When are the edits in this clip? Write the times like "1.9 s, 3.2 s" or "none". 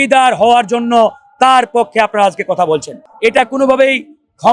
3.0 s